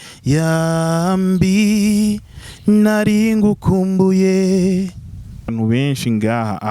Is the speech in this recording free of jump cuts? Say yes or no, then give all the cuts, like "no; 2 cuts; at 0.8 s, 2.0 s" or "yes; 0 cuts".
no; 1 cut; at 5.5 s